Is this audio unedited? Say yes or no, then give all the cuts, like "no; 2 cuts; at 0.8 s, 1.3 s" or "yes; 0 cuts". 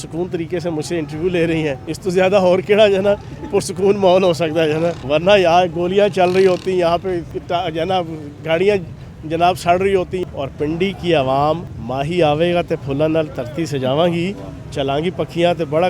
no; 5 cuts; at 1.9 s, 5.0 s, 7.3 s, 10.2 s, 11.8 s